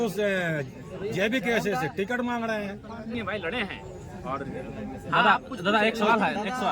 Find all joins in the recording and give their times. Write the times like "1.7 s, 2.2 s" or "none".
3.1 s